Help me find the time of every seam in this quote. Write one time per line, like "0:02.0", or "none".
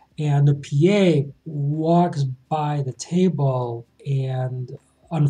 none